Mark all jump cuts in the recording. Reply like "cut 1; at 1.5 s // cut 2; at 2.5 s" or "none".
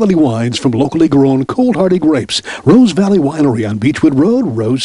none